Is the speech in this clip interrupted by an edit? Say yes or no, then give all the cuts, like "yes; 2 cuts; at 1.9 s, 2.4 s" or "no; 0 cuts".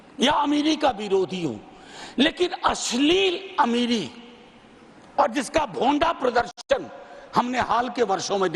no; 0 cuts